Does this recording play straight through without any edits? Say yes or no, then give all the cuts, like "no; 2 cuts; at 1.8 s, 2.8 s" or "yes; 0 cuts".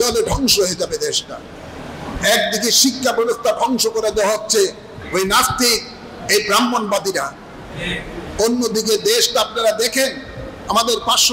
yes; 0 cuts